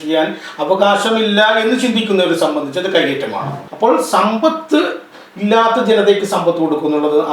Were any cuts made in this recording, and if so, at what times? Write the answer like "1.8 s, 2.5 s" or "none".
3.6 s